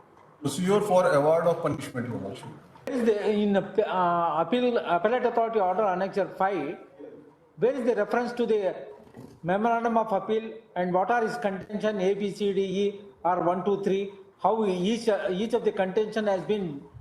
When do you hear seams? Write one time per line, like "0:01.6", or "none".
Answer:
0:02.9